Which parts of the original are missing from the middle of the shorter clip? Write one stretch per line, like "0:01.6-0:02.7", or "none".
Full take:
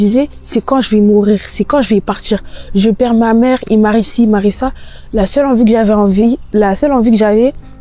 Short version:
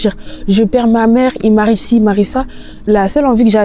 0:05.0-0:06.4